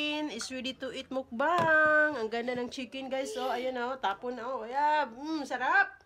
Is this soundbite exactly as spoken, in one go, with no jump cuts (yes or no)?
yes